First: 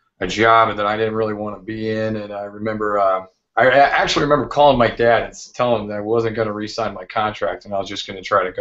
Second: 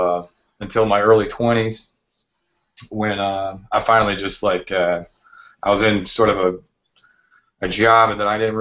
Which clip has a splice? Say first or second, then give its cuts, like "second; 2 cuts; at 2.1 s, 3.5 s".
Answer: second; 1 cut; at 5.8 s